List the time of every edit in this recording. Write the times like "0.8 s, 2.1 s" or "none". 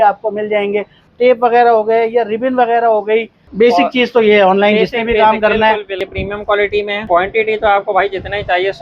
1.1 s, 3.4 s, 5.9 s, 7.0 s